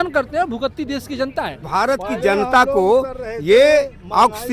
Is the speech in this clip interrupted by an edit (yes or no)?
yes